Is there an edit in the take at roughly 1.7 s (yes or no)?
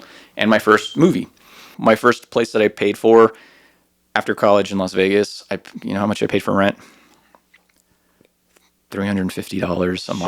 yes